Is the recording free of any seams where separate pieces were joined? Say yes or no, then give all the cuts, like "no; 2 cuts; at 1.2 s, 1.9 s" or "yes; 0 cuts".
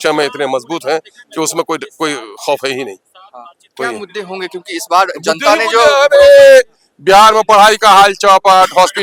yes; 0 cuts